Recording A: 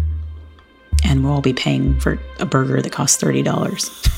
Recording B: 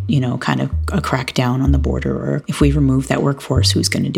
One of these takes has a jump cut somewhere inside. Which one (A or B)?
A